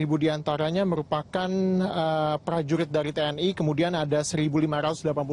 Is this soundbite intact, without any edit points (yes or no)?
yes